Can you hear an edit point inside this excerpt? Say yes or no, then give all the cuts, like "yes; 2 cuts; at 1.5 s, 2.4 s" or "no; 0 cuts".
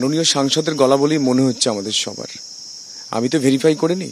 no; 0 cuts